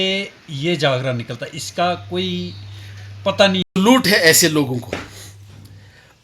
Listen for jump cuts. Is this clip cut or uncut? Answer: cut